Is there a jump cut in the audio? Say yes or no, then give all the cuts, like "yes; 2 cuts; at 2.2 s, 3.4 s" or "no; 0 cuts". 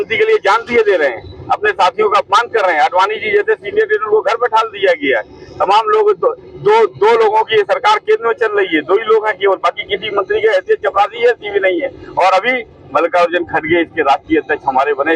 no; 0 cuts